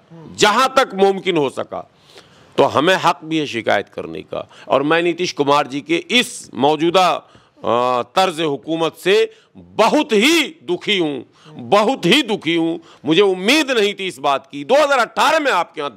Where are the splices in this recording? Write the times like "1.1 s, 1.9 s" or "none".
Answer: none